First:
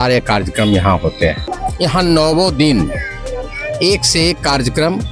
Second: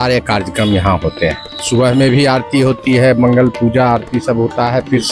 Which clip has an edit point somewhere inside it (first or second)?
first